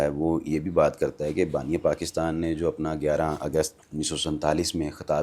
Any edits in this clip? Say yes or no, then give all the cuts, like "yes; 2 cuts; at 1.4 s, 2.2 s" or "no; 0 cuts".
yes; 1 cut; at 3.8 s